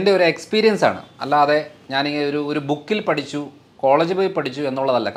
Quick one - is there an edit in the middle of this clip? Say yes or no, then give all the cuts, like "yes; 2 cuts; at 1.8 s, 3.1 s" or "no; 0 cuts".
no; 0 cuts